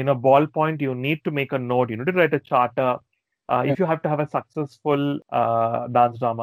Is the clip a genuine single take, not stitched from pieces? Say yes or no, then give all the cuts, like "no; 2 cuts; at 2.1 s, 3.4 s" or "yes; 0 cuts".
no; 1 cut; at 5.2 s